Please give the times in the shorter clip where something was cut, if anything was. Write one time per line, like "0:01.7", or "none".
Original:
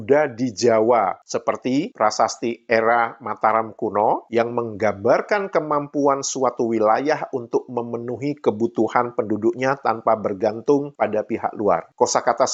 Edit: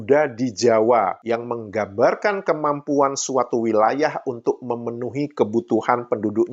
0:01.2